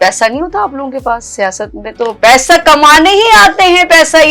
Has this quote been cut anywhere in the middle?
no; 0 cuts

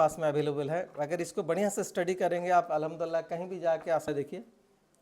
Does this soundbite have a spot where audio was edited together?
yes; 1 cut; at 4.1 s

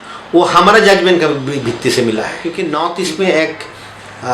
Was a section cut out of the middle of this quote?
yes; 1 cut; at 2.4 s

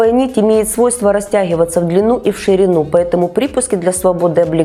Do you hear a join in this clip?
no; 0 cuts

